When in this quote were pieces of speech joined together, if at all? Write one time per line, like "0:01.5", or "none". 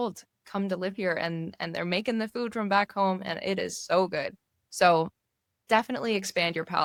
none